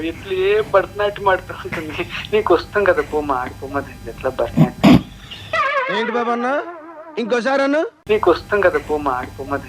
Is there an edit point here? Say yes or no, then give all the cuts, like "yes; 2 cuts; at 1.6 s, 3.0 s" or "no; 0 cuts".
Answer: yes; 3 cuts; at 2.4 s, 5.7 s, 8.0 s